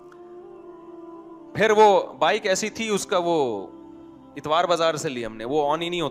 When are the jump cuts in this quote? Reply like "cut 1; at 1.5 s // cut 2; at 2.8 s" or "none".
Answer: cut 1; at 1.4 s